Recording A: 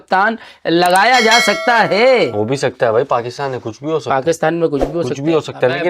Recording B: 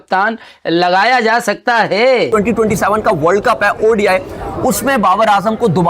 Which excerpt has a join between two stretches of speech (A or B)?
B